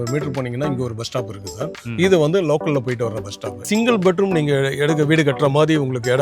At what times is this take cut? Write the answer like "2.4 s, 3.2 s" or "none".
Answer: 3.7 s